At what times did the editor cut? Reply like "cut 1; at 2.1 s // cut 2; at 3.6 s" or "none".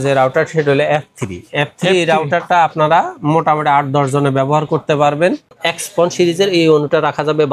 cut 1; at 5.5 s